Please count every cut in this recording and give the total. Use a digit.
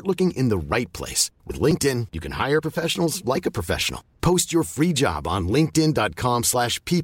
0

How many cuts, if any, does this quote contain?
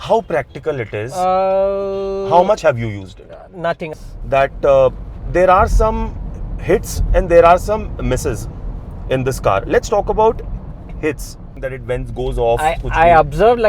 2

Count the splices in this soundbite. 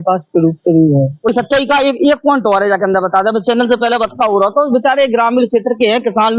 1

